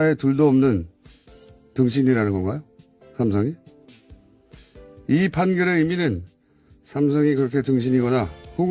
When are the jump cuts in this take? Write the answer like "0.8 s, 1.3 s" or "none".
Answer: none